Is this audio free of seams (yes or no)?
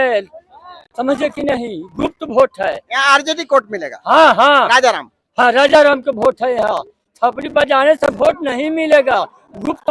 yes